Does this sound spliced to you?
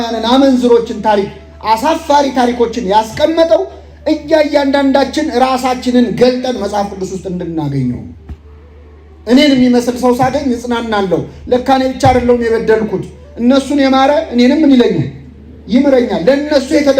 no; 0 cuts

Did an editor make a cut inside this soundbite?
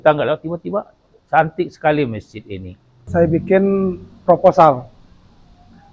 yes; 1 cut; at 3.1 s

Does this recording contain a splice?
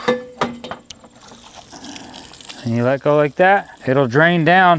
yes; 1 cut; at 3.8 s

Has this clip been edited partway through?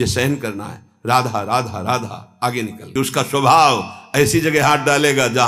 yes; 1 cut; at 2.9 s

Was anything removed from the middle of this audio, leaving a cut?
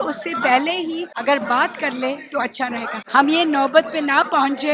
yes; 2 cuts; at 1.1 s, 3.0 s

